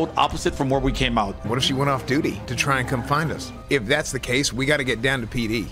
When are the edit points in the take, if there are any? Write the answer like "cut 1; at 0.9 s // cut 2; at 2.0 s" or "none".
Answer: cut 1; at 1.3 s // cut 2; at 2.5 s